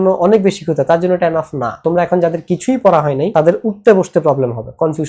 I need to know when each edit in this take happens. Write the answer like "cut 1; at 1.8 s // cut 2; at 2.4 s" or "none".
cut 1; at 1.8 s // cut 2; at 3.3 s